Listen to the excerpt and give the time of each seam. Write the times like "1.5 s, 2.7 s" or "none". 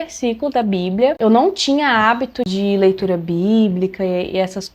none